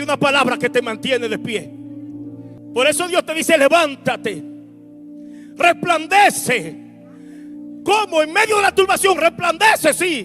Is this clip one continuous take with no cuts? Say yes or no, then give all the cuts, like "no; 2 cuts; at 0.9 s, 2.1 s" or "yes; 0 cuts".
no; 1 cut; at 2.5 s